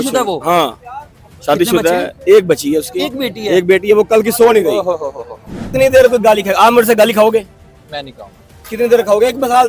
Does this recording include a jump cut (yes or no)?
yes